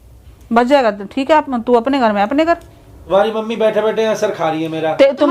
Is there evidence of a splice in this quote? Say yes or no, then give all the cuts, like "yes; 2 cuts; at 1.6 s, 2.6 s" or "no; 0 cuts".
yes; 1 cut; at 3.1 s